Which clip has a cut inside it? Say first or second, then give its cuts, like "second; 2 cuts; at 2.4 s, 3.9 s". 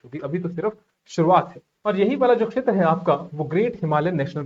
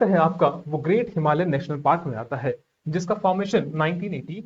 first; 1 cut; at 1.6 s